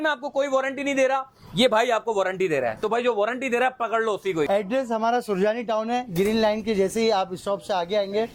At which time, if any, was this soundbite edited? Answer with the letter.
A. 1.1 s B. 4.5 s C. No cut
B